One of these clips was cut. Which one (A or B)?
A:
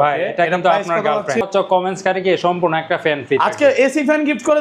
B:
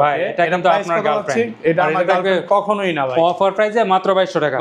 A